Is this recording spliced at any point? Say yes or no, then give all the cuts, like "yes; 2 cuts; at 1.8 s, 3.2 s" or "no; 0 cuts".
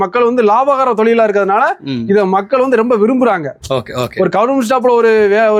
no; 0 cuts